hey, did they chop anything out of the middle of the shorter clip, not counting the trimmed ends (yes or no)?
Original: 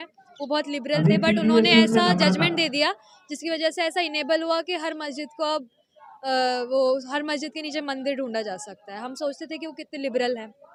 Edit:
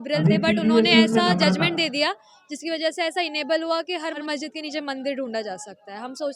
yes